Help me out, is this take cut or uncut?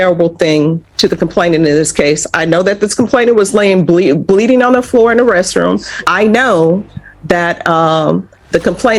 cut